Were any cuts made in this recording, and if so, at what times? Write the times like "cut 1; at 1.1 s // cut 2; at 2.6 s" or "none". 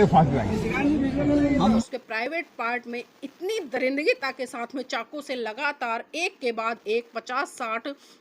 cut 1; at 1.8 s

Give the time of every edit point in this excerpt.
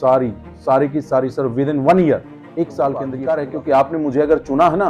cut 1; at 3.1 s

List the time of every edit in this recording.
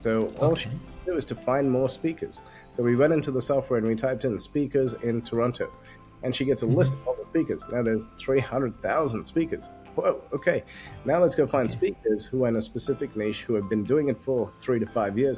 none

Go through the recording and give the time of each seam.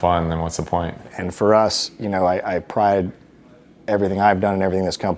cut 1; at 1.2 s

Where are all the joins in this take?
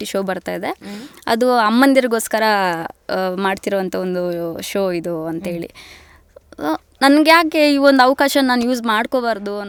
none

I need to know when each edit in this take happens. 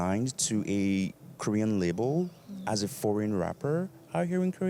none

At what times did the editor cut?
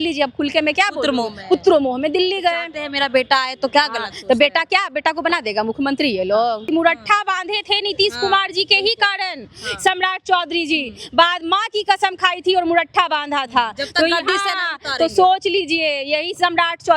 cut 1; at 6.7 s

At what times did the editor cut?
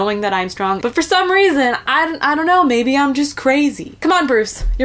cut 1; at 0.8 s // cut 2; at 3.9 s

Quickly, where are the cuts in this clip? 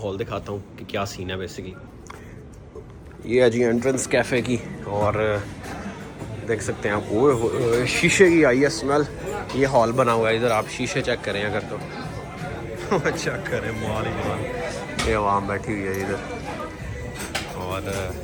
none

